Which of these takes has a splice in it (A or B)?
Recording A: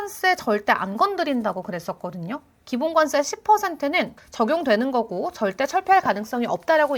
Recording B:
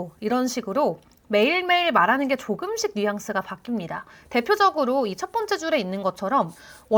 A